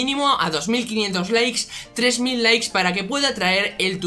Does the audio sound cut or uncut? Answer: uncut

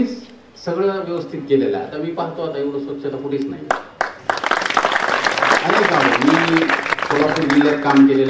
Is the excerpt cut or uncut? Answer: uncut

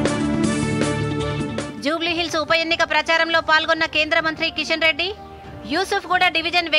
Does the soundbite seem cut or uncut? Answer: uncut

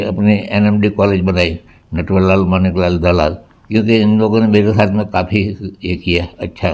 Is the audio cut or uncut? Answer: cut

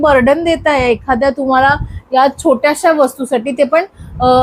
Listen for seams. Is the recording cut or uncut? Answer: uncut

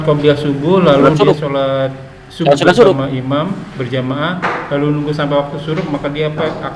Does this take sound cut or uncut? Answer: uncut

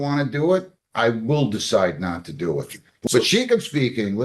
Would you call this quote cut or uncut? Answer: cut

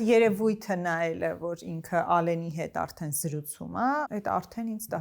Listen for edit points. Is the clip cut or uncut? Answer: cut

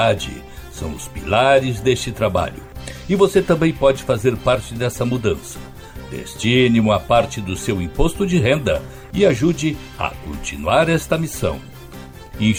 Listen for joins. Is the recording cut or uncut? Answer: uncut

